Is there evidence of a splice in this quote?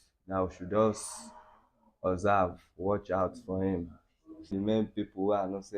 yes; 1 cut; at 4.5 s

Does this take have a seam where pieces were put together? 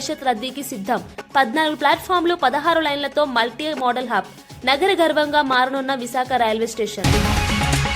yes; 1 cut; at 7.0 s

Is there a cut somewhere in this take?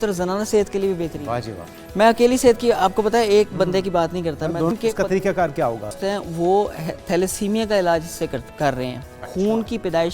yes; 2 cuts; at 4.7 s, 6.0 s

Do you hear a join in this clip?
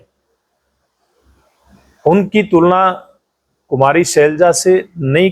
no; 0 cuts

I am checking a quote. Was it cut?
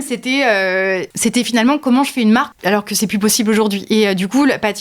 yes; 2 cuts; at 1.1 s, 2.5 s

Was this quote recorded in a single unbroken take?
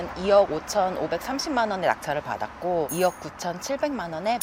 yes; 0 cuts

